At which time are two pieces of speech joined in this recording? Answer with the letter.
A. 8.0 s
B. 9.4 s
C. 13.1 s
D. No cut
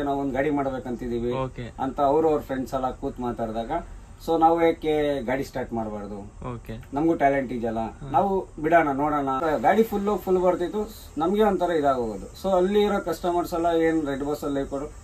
B